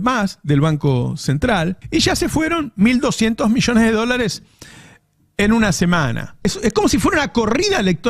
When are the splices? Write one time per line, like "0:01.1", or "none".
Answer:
0:01.8
0:06.4